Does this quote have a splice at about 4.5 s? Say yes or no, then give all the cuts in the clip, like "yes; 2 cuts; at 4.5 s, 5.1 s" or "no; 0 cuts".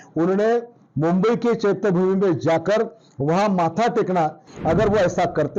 yes; 1 cut; at 4.5 s